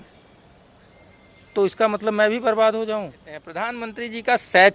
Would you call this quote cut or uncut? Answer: cut